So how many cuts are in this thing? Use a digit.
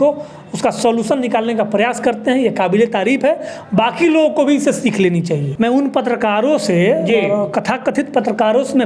1